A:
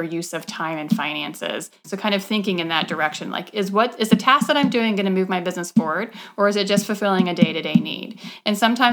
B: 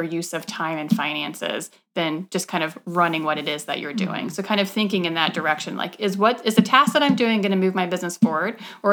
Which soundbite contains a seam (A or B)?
A